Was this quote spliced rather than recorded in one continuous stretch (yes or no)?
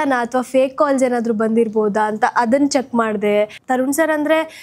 yes